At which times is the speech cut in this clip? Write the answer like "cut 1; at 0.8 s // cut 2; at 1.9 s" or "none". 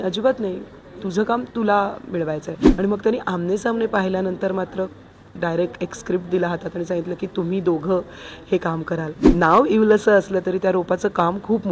cut 1; at 2.6 s // cut 2; at 9.3 s